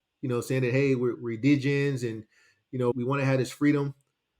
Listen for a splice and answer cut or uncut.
cut